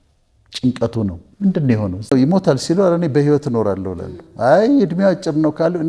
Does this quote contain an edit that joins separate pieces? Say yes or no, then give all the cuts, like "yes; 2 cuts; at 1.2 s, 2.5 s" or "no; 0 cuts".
yes; 1 cut; at 2.1 s